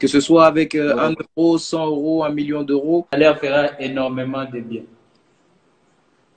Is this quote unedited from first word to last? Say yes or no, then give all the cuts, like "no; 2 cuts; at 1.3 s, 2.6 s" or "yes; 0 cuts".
no; 1 cut; at 3.1 s